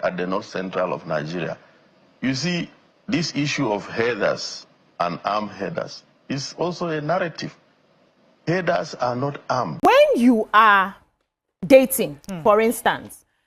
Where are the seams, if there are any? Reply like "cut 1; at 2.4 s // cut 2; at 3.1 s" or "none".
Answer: cut 1; at 9.8 s